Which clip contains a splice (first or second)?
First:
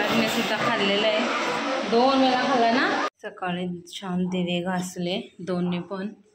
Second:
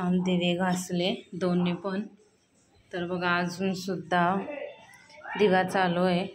first